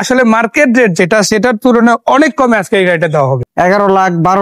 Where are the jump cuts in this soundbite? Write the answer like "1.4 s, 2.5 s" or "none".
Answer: 3.4 s